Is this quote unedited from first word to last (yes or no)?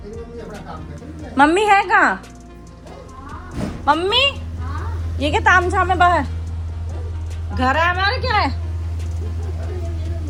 yes